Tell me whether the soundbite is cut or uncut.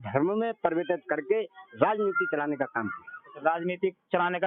uncut